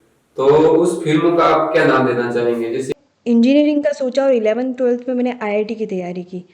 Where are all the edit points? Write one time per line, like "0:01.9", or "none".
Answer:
0:02.9